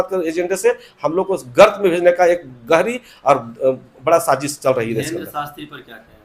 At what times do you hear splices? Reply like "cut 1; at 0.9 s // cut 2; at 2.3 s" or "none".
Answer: none